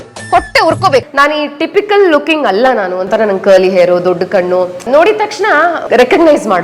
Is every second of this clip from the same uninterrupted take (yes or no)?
no